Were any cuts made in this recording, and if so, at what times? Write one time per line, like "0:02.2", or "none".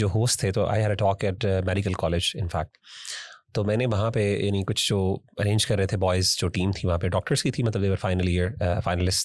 none